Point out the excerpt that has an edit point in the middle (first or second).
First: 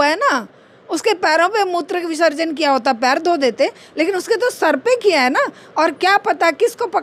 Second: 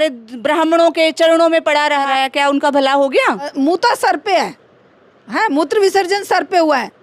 second